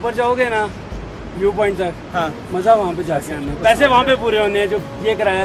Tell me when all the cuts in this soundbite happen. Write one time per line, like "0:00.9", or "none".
none